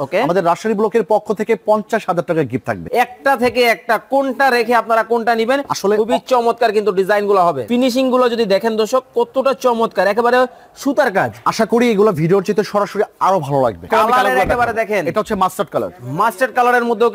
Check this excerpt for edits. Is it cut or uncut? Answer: cut